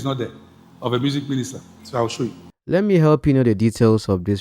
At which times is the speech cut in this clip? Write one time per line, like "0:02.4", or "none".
0:02.5